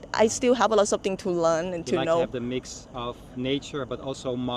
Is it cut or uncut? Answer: uncut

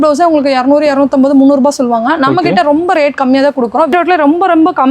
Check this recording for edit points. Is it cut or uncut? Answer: cut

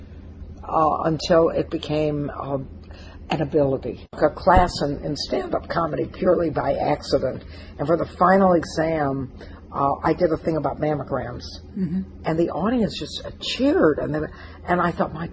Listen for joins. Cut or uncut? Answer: cut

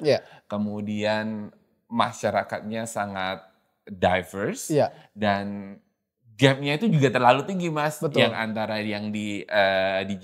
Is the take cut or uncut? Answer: uncut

